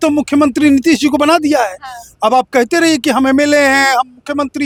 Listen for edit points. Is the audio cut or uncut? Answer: uncut